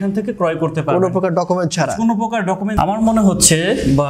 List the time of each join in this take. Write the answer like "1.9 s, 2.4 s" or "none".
2.7 s